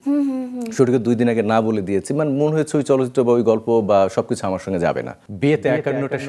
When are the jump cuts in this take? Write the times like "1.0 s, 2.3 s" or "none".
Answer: 5.2 s

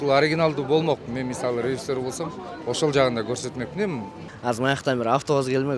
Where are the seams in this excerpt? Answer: 4.2 s

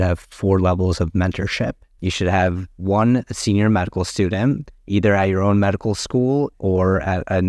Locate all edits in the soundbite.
1.9 s, 4.7 s, 6.6 s

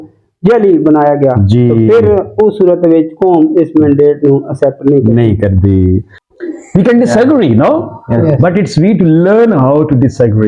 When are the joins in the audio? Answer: 6.1 s

